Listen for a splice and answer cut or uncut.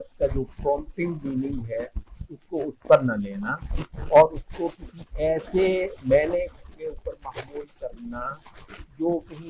uncut